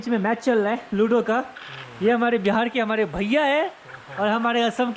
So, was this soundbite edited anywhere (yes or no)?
no